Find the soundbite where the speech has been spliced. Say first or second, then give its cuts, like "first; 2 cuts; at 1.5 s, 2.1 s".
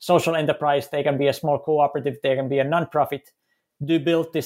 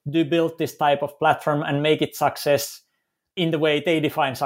second; 1 cut; at 3.4 s